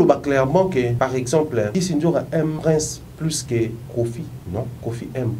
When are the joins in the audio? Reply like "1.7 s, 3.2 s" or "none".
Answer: 0.9 s, 1.7 s, 2.6 s, 4.4 s